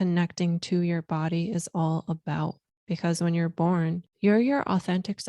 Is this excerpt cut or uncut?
cut